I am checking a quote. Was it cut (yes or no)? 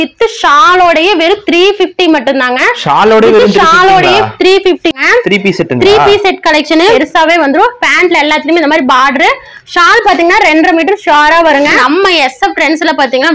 yes